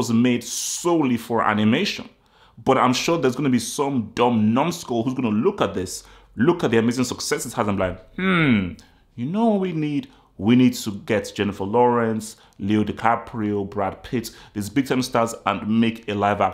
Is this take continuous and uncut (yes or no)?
yes